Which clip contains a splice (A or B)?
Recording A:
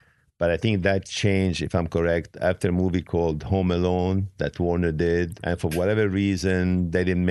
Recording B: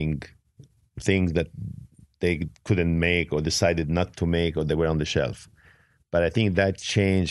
A